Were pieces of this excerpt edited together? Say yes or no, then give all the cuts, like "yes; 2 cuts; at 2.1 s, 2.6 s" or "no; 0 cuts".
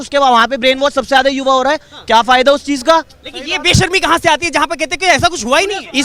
no; 0 cuts